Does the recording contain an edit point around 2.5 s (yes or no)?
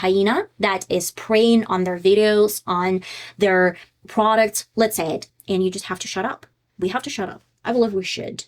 no